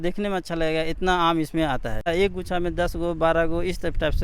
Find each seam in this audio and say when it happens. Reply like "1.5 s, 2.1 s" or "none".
2.1 s

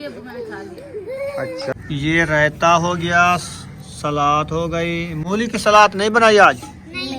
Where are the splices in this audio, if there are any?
1.7 s

